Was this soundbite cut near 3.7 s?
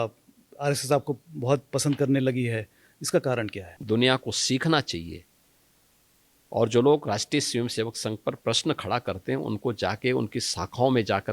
yes; 1 cut; at 3.7 s

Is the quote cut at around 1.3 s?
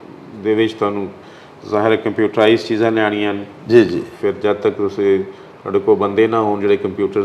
no; 0 cuts

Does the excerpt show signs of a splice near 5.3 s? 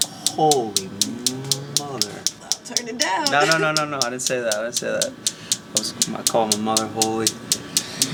no; 0 cuts

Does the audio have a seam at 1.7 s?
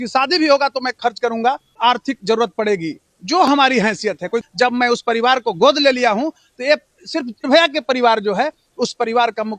yes; 3 cuts; at 1.7 s, 4.4 s, 7.5 s

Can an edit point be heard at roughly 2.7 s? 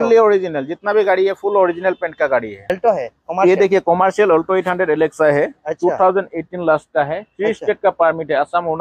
yes; 1 cut; at 2.7 s

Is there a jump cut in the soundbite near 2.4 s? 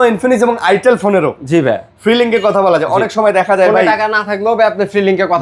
no; 0 cuts

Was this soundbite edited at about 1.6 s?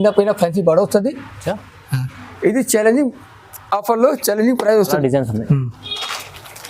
no; 1 cut; at 5.0 s

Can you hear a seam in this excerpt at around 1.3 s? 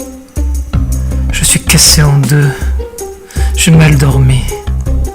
yes; 1 cut; at 1.3 s

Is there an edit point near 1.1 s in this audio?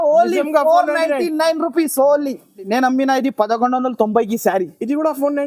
no; 1 cut; at 2.7 s

